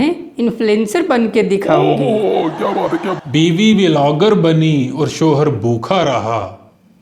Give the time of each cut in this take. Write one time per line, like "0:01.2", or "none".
0:03.1

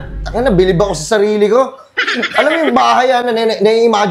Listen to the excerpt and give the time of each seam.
none

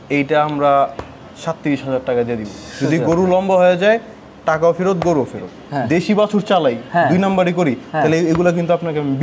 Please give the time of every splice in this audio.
0:02.6
0:05.6

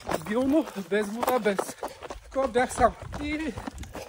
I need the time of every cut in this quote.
0:03.1

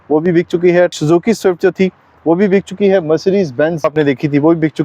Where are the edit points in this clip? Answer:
0:03.8

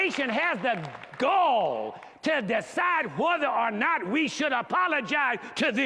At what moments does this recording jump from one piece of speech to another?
none

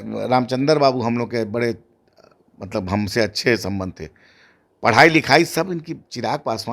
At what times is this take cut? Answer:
none

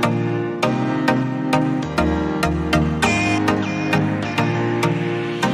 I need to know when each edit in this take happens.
none

